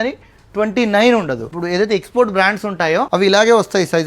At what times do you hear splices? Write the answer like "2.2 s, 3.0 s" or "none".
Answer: 1.5 s, 3.1 s

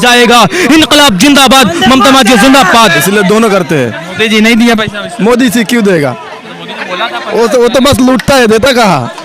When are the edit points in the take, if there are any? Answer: 3.0 s

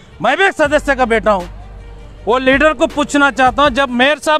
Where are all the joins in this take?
1.7 s

